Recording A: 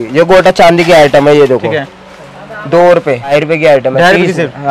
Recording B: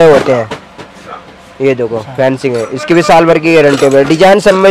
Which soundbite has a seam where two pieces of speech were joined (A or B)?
A